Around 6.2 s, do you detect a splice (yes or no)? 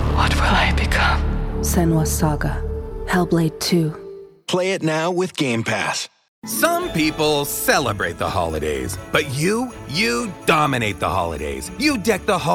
yes